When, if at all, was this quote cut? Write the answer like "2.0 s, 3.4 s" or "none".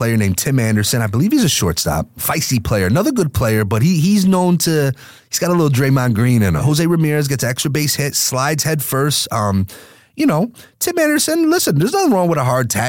2.2 s, 6.6 s